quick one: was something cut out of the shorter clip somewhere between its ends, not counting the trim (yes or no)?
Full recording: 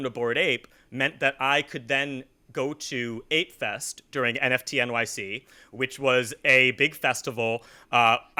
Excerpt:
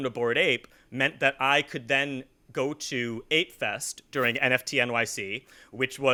no